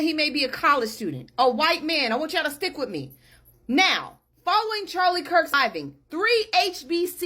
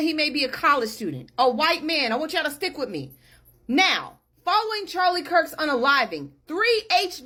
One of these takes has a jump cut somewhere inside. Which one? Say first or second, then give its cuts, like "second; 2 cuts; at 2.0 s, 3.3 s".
first; 1 cut; at 5.6 s